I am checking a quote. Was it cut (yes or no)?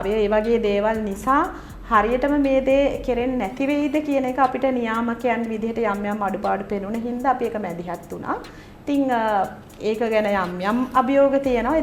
no